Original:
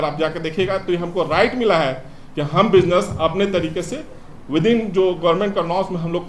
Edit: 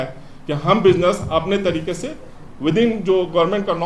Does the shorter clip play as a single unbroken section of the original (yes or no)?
yes